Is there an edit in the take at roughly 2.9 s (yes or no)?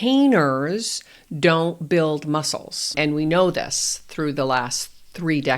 yes